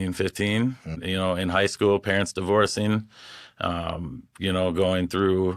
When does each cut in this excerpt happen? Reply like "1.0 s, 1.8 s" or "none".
1.0 s